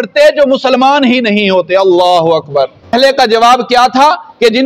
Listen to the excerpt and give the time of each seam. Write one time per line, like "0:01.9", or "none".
0:02.9